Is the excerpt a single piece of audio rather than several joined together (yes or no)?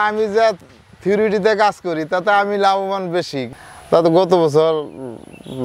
no